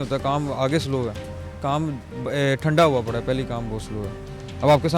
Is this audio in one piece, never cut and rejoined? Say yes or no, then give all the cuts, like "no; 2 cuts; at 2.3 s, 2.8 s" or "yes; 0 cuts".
yes; 0 cuts